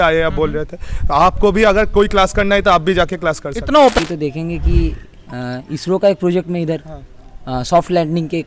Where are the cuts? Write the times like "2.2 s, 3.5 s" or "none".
4.0 s